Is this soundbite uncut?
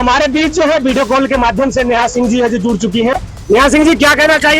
no; 1 cut; at 3.1 s

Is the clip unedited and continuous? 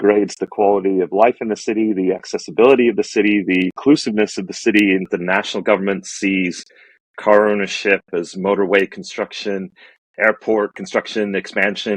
no; 3 cuts; at 3.8 s, 5.1 s, 10.8 s

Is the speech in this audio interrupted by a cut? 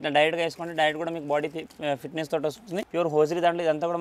yes; 1 cut; at 2.8 s

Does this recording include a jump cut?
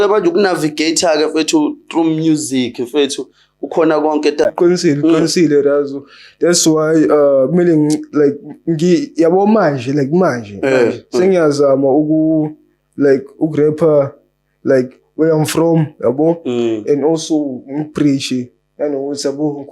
yes; 1 cut; at 4.4 s

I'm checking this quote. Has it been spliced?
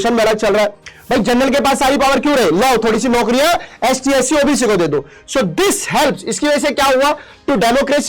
yes; 1 cut; at 0.9 s

